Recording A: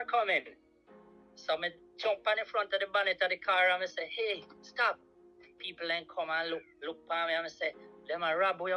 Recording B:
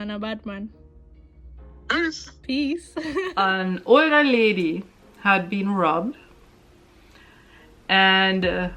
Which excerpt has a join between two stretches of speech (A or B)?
B